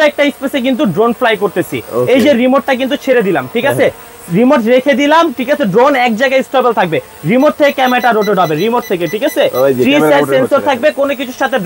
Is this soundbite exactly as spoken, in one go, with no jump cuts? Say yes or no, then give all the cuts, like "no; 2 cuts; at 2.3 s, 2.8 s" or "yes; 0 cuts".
yes; 0 cuts